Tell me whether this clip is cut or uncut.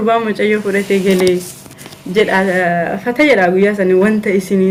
uncut